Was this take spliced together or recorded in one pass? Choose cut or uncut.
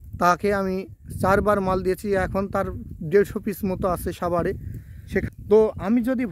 cut